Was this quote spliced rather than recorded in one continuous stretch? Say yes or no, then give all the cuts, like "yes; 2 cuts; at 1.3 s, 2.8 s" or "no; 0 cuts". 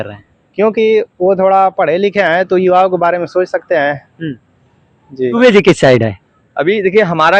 yes; 1 cut; at 5.3 s